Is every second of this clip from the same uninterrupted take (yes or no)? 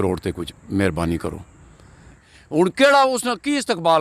no